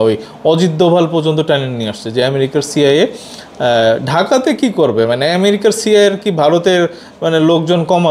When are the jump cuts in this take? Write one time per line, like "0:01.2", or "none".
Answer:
none